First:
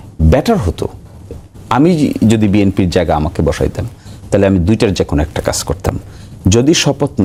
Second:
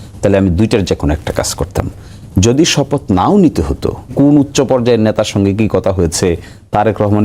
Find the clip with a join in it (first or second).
second